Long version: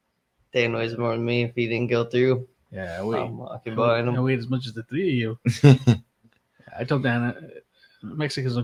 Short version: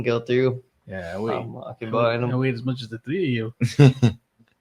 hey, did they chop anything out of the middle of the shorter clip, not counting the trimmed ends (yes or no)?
no